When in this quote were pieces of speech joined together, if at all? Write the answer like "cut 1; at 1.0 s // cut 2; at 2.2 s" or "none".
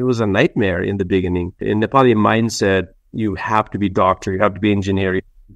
cut 1; at 1.6 s